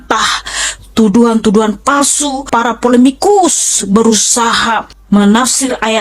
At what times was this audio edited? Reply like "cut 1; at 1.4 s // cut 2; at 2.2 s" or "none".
cut 1; at 2.5 s // cut 2; at 4.9 s